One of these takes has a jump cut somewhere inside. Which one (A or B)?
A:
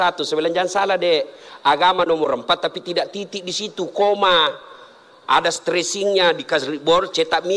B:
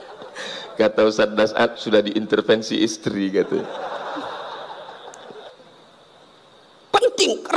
B